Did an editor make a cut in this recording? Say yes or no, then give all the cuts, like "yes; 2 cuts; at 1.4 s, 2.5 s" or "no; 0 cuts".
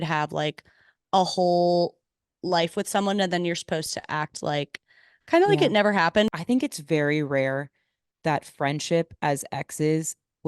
yes; 1 cut; at 6.3 s